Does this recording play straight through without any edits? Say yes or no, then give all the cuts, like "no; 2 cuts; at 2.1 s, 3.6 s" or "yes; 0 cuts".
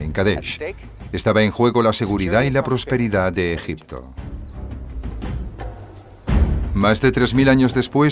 no; 1 cut; at 3.9 s